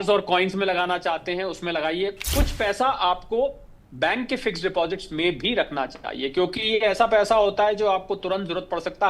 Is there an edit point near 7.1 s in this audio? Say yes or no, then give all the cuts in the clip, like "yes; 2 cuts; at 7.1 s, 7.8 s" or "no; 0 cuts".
no; 1 cut; at 2.2 s